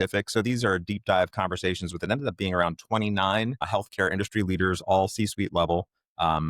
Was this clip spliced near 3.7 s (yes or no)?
yes